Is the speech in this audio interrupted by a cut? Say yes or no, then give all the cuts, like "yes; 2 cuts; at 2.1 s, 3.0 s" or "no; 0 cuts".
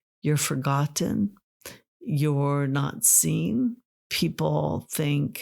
yes; 1 cut; at 4.0 s